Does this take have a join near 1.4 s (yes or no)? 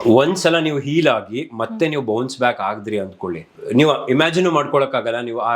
no